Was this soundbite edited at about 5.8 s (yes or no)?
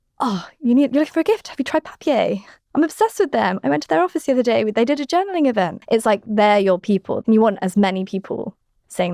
yes